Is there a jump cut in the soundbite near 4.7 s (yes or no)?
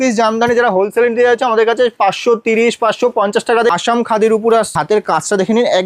yes